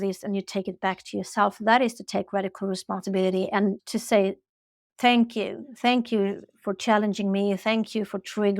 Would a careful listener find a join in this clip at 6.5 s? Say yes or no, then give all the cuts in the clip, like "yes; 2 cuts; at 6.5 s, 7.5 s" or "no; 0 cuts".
no; 1 cut; at 3.8 s